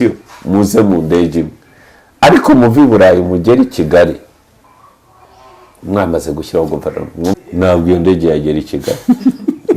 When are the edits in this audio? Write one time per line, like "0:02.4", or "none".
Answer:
0:07.4